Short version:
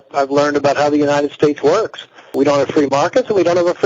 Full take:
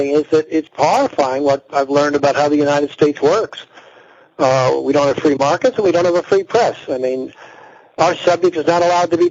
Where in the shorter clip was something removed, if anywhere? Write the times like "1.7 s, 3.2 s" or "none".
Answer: 2.3 s